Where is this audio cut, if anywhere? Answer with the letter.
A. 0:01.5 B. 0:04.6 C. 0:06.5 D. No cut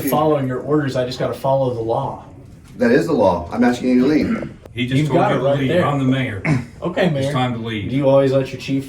B